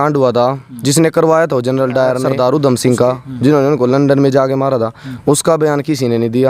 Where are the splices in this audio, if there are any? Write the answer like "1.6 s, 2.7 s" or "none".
2.3 s